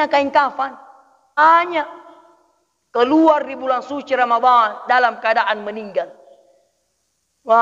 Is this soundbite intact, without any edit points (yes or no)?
no